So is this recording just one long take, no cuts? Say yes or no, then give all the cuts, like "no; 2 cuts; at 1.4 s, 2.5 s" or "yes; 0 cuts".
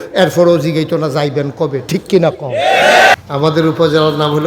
no; 1 cut; at 3.1 s